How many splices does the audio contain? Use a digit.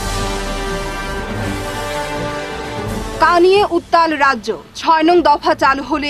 0